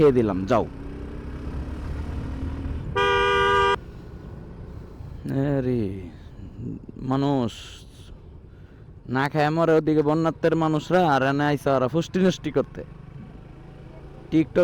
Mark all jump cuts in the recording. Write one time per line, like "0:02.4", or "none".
0:03.7